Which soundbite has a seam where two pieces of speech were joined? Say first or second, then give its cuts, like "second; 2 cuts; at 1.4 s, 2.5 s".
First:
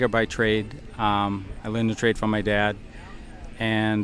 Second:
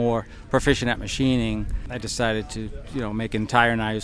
second; 1 cut; at 1.8 s